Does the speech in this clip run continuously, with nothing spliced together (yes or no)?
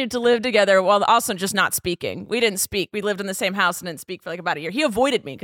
yes